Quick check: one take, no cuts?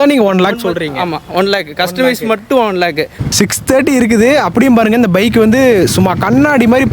no; 1 cut; at 3.1 s

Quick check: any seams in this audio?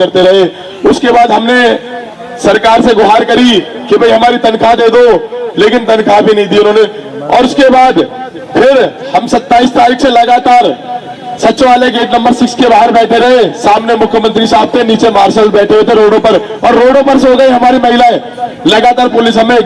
no; 0 cuts

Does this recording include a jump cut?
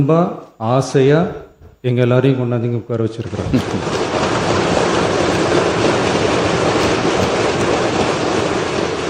no; 0 cuts

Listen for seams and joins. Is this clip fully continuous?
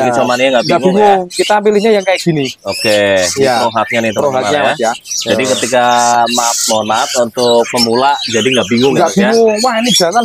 yes; 0 cuts

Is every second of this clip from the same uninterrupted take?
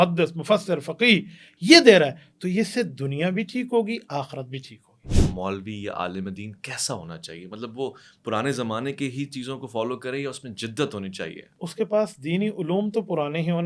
no; 2 cuts; at 5.2 s, 11.4 s

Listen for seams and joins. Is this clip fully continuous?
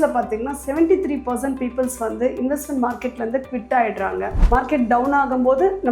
no; 1 cut; at 4.3 s

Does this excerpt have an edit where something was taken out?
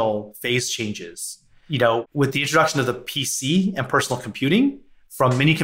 no; 0 cuts

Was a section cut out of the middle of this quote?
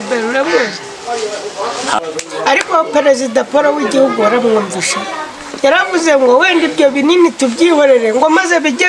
yes; 1 cut; at 2.0 s

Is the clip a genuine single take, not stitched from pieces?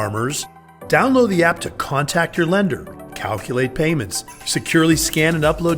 yes; 0 cuts

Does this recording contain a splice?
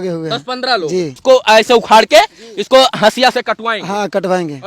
yes; 1 cut; at 1.2 s

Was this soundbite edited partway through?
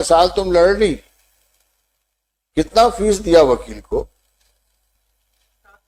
no; 0 cuts

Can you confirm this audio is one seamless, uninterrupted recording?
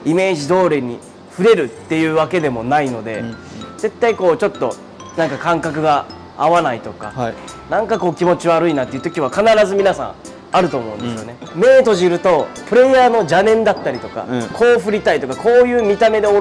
no; 1 cut; at 11.4 s

